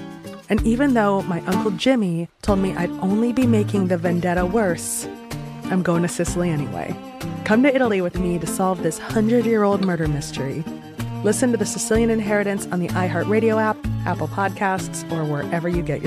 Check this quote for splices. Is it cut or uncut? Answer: uncut